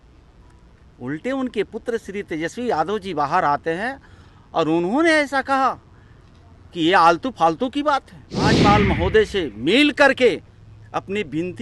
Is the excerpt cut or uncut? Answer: cut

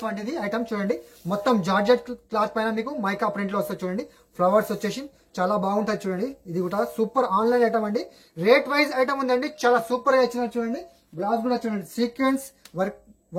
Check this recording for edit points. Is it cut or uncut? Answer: uncut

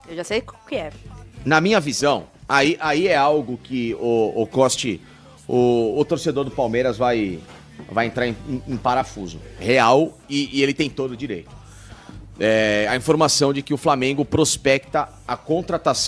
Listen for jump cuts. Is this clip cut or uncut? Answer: uncut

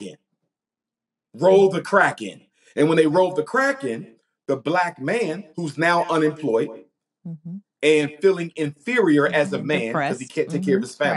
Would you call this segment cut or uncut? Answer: uncut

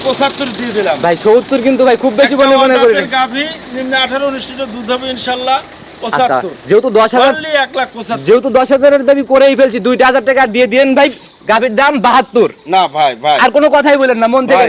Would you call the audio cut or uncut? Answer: uncut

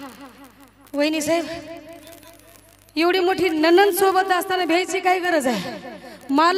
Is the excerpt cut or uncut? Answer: uncut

